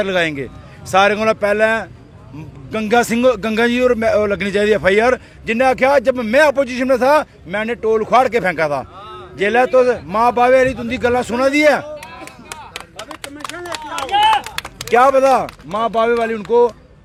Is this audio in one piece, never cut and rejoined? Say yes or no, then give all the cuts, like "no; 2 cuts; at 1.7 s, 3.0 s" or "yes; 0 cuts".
yes; 0 cuts